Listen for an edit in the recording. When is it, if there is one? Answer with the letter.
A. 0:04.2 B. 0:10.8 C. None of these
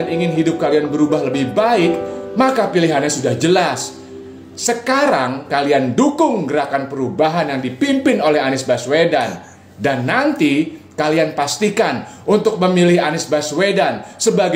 C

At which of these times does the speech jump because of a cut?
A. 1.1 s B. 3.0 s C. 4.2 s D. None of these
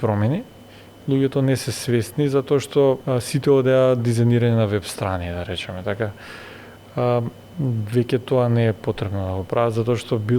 B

